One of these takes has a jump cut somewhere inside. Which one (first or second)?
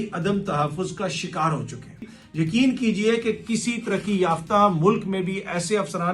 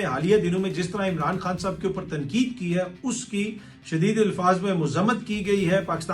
first